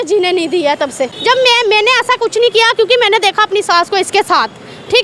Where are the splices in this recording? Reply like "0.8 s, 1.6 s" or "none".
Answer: 1.1 s